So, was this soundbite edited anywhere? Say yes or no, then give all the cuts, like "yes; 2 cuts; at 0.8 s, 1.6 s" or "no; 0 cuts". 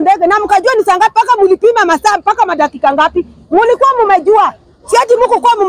no; 0 cuts